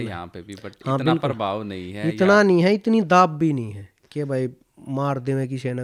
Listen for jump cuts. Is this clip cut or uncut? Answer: uncut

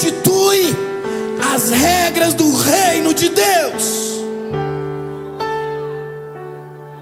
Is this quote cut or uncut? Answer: uncut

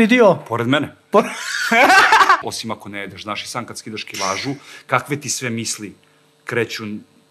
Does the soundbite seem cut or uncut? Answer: cut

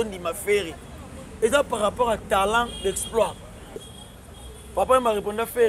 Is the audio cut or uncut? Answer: cut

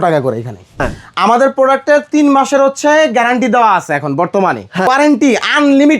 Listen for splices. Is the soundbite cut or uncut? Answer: cut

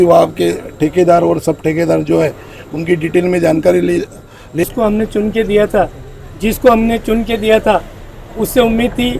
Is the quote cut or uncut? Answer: cut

